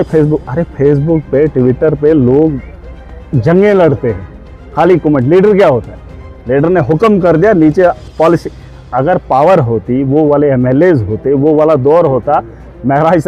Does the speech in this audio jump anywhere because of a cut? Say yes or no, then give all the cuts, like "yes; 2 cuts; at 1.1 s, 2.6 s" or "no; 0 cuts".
no; 0 cuts